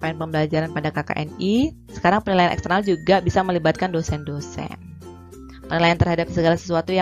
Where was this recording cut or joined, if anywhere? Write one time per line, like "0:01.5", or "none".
0:01.8